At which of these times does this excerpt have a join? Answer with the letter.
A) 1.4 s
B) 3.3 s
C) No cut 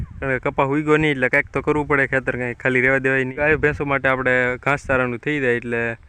B